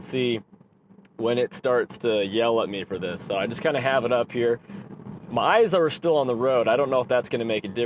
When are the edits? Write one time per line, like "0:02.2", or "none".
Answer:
none